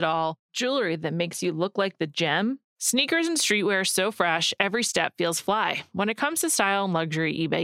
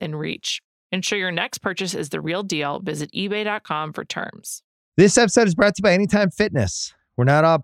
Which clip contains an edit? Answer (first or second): second